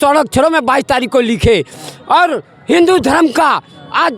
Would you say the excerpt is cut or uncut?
uncut